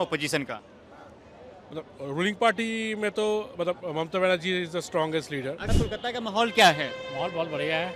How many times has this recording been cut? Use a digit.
1